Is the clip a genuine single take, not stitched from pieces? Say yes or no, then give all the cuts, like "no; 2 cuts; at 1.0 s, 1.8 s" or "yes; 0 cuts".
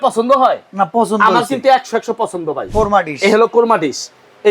no; 1 cut; at 2.6 s